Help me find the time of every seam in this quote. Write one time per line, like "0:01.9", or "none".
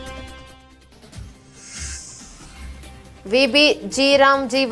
none